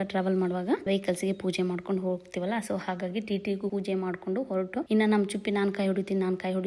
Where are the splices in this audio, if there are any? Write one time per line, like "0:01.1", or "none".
0:00.9
0:03.7
0:04.9